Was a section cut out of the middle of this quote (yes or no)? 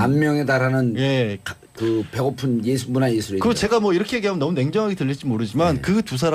no